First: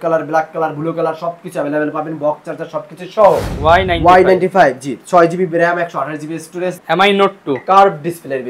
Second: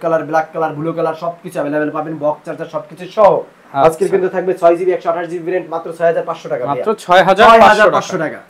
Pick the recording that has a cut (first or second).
first